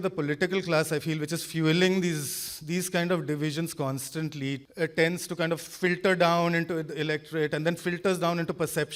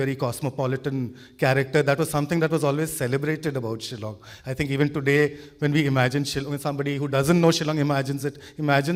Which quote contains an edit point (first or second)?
first